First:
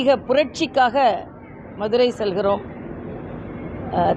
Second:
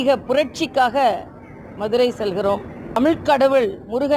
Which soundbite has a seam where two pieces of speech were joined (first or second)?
second